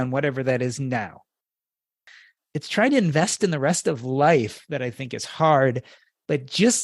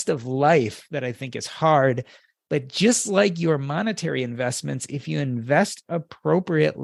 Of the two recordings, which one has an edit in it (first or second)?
first